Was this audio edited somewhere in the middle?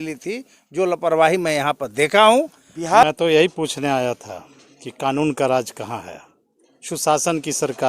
yes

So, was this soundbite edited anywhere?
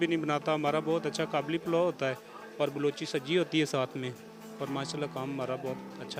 no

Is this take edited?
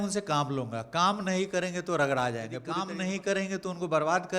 yes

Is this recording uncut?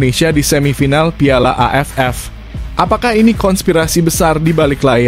yes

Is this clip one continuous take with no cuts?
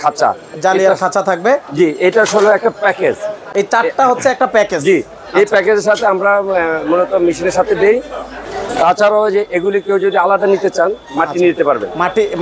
yes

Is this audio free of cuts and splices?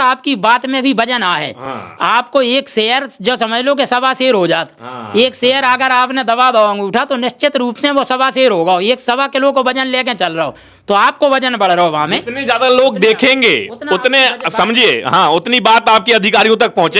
yes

